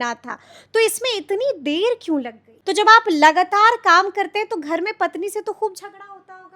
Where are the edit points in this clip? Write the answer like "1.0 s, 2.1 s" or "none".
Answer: 2.5 s